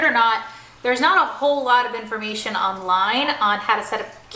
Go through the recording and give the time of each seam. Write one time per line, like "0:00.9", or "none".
none